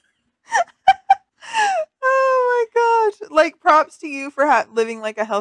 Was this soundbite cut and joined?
yes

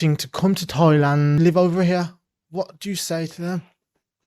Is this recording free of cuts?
no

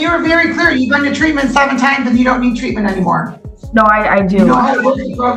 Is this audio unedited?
yes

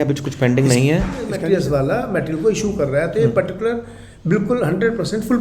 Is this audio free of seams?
no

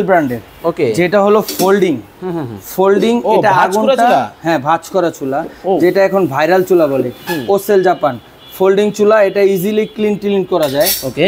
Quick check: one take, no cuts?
yes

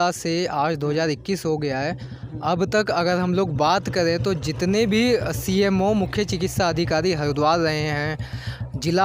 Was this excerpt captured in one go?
yes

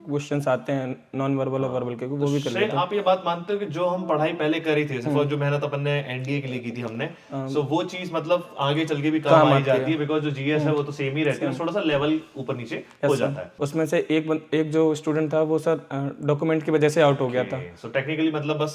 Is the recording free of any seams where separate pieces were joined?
no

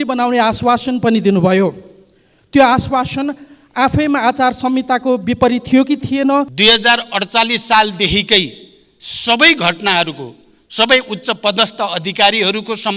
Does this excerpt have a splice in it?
yes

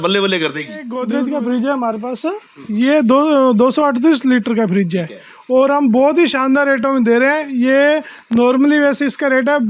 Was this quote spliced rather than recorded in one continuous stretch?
yes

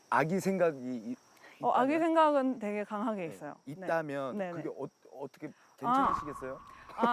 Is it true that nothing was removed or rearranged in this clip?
yes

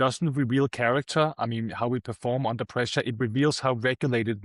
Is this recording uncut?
yes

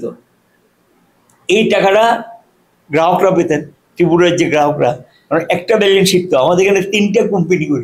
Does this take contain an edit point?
no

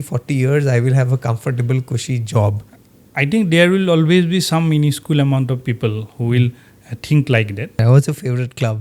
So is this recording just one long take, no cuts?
no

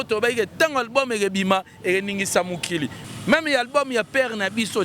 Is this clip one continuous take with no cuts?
no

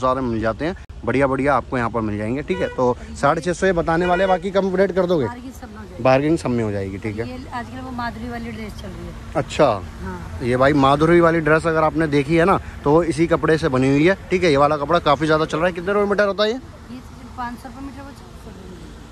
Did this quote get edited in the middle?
no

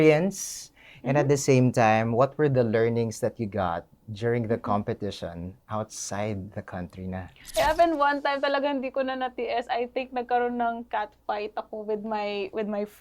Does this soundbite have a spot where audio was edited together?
yes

